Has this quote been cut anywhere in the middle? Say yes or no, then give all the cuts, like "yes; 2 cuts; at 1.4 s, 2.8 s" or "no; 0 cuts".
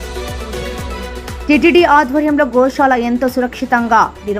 yes; 1 cut; at 1.3 s